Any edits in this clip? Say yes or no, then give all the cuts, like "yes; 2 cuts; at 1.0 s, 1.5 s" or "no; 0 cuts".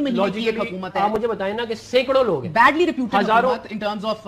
no; 0 cuts